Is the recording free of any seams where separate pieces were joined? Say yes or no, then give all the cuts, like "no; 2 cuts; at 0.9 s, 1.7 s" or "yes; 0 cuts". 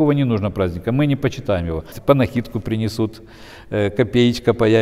no; 1 cut; at 1.9 s